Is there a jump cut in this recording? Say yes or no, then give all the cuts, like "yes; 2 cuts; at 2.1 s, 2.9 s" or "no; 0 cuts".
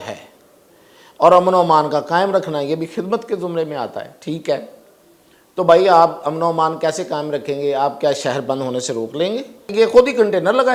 yes; 1 cut; at 9.7 s